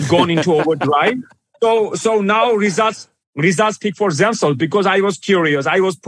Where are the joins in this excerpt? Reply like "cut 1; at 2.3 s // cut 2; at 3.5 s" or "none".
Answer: none